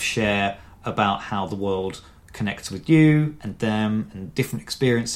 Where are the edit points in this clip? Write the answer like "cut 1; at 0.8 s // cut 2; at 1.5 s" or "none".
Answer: none